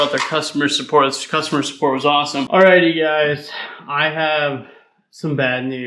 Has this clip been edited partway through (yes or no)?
yes